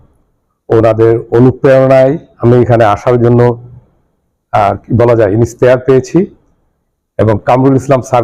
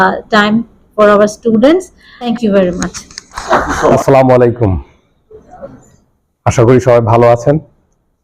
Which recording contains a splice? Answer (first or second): second